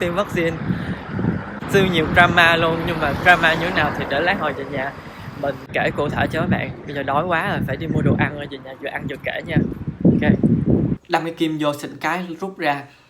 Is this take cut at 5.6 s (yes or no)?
yes